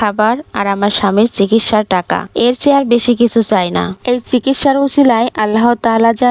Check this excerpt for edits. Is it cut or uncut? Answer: uncut